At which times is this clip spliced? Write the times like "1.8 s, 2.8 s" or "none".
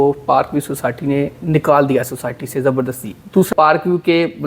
3.5 s